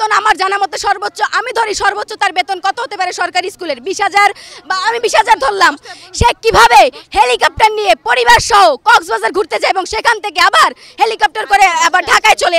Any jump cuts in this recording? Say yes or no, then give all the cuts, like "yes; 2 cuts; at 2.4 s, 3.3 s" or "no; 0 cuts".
no; 0 cuts